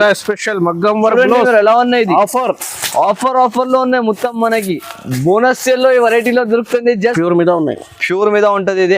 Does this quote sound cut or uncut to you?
cut